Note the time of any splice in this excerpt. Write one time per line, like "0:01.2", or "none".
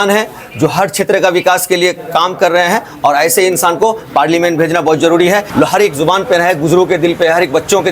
0:05.5